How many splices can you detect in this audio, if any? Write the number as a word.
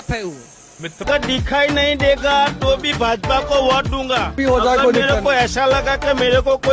one